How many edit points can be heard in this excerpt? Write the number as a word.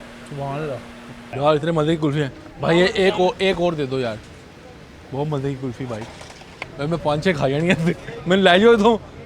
one